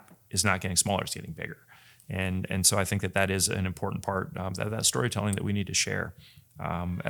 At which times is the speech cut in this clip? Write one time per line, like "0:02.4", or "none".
none